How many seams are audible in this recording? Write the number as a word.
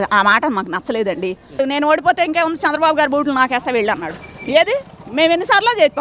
one